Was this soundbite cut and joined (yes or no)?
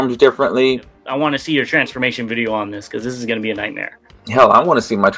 yes